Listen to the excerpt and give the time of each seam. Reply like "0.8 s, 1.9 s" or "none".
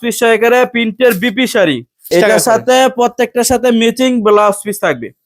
2.0 s